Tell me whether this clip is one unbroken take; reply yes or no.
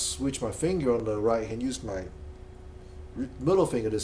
yes